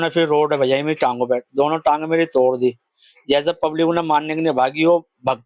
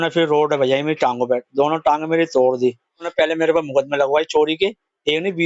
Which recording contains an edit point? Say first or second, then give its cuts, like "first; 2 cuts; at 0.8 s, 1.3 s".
second; 1 cut; at 3.0 s